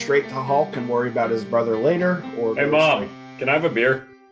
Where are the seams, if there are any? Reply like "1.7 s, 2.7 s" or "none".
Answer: none